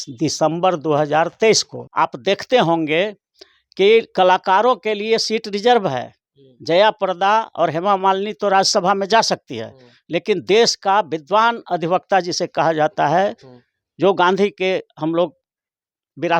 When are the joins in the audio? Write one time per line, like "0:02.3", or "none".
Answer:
0:01.8